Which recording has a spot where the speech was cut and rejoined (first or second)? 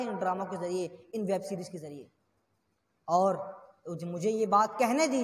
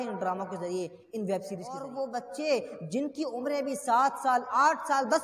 second